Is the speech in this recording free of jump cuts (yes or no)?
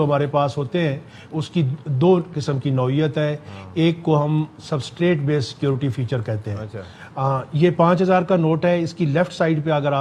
yes